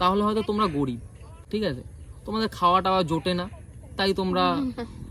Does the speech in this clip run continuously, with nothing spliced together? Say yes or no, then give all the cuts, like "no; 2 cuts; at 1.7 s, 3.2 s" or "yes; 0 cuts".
yes; 0 cuts